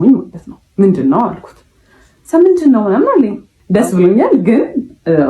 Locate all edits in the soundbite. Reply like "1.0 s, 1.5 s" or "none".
3.6 s